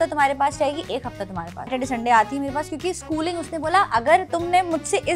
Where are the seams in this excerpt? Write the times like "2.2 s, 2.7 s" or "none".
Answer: 1.7 s